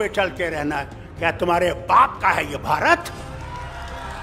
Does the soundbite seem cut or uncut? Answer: uncut